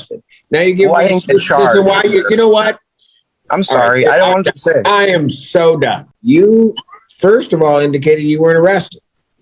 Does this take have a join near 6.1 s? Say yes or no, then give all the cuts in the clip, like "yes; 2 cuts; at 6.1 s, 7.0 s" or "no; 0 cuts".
yes; 1 cut; at 6.1 s